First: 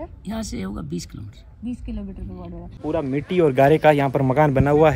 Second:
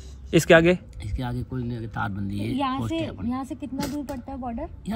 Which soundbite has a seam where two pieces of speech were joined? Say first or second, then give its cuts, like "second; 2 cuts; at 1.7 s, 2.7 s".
first; 1 cut; at 2.7 s